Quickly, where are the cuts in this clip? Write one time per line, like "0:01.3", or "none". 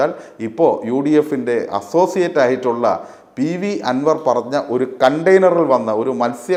none